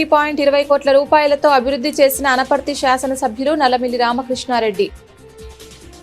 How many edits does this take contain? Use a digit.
1